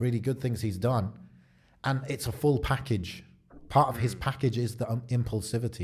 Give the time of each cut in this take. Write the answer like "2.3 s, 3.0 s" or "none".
none